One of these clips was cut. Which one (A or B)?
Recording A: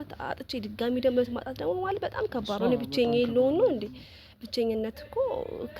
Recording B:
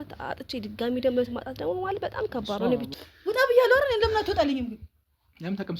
B